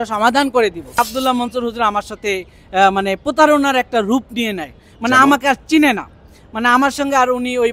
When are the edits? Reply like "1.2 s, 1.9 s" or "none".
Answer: 1.0 s